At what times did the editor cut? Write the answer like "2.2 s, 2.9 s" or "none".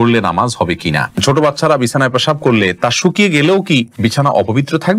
1.2 s, 3.9 s